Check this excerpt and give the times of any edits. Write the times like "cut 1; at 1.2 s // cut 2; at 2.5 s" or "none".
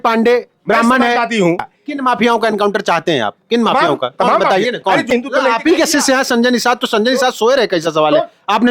cut 1; at 1.7 s // cut 2; at 5.1 s